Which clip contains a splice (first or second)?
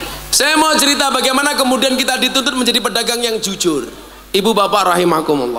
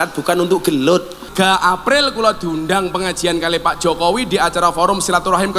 second